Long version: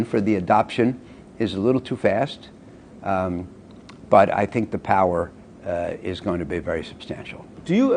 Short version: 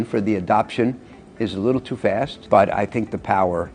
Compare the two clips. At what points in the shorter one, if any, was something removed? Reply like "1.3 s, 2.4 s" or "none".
2.4 s